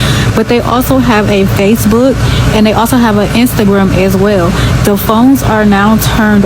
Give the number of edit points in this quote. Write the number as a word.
zero